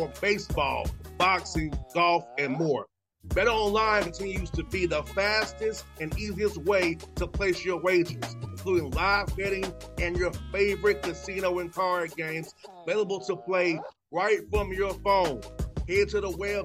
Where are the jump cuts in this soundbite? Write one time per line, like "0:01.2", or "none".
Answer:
none